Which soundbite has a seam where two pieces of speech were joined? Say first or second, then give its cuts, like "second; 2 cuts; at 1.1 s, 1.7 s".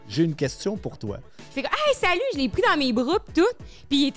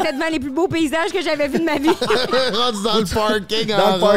first; 1 cut; at 1.5 s